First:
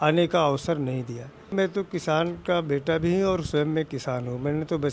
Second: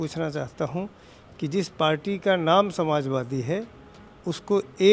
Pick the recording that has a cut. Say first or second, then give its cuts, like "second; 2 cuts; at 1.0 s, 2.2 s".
first; 1 cut; at 1.5 s